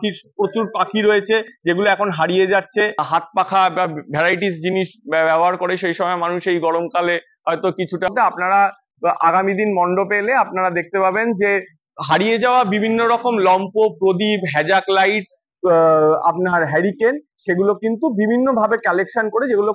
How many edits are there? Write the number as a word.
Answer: two